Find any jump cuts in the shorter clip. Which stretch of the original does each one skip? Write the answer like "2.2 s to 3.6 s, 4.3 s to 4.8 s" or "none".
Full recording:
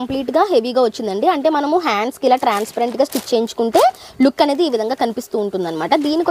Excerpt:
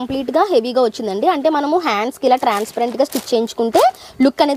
none